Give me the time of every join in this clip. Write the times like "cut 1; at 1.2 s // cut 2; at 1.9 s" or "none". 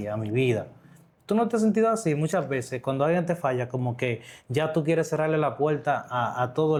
none